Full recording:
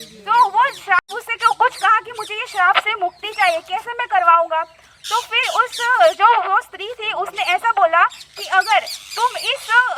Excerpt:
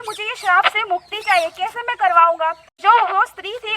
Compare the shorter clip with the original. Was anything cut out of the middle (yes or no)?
yes